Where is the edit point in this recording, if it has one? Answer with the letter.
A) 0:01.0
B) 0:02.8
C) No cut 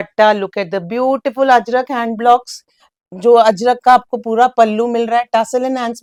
C